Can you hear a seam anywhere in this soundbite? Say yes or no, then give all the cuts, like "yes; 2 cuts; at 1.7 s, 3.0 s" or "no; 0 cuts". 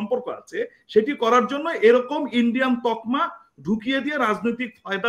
no; 0 cuts